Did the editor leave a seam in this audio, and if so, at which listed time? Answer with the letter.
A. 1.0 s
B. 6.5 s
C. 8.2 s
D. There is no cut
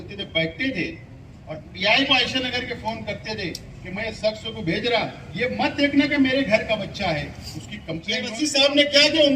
C